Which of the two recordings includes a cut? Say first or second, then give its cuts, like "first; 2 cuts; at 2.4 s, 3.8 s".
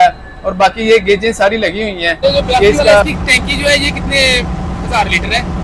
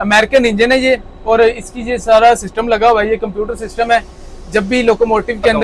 first; 1 cut; at 3.0 s